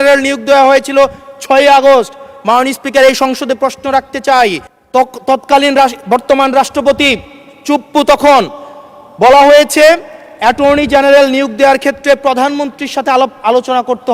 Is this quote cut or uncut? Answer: uncut